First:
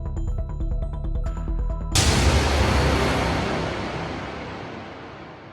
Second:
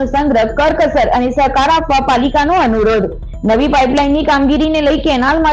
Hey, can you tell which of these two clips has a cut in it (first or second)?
first